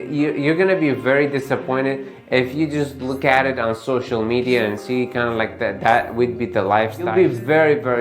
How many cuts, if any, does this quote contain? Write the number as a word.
one